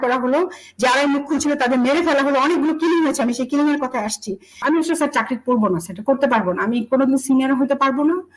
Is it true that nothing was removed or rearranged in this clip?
no; 1 cut; at 4.6 s

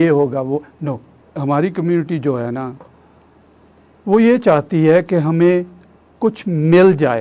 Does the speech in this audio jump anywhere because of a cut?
yes; 1 cut; at 1.4 s

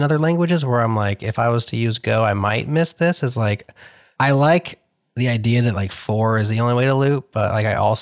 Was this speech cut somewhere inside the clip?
no; 0 cuts

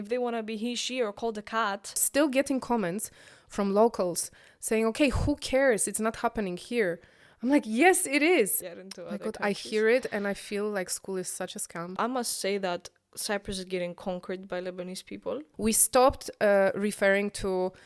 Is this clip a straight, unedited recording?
no; 4 cuts; at 2.0 s, 8.6 s, 12.0 s, 15.5 s

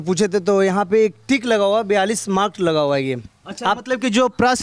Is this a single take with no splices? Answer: yes; 0 cuts

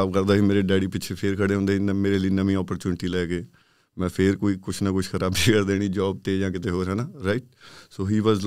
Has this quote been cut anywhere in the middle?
no; 0 cuts

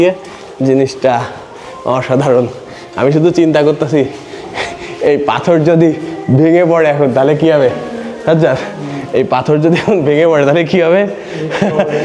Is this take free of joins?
yes; 0 cuts

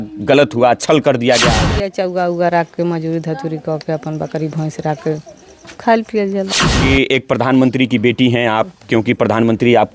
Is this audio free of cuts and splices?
no; 2 cuts; at 1.6 s, 6.6 s

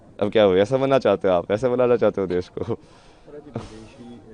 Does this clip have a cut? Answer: no; 0 cuts

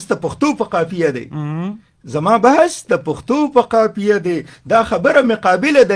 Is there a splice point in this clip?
no; 0 cuts

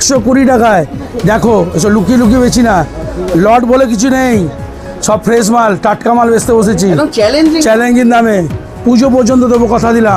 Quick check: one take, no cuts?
yes; 0 cuts

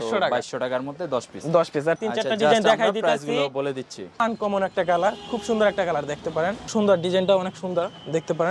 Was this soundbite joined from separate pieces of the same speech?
yes; 3 cuts; at 2.0 s, 4.2 s, 6.7 s

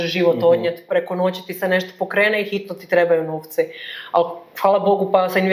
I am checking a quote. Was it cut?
no; 0 cuts

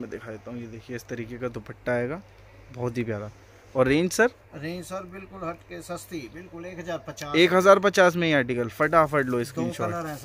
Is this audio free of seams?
yes; 0 cuts

